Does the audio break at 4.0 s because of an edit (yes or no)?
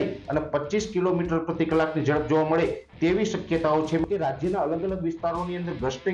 yes